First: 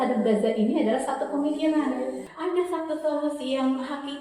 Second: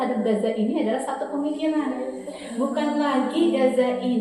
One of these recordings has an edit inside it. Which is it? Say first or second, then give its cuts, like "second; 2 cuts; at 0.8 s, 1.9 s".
first; 1 cut; at 2.2 s